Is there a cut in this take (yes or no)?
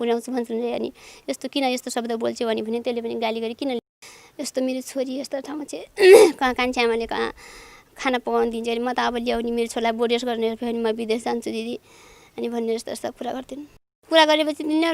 yes